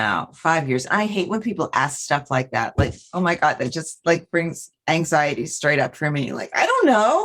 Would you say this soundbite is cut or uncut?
uncut